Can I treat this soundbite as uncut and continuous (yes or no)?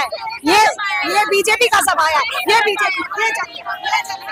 yes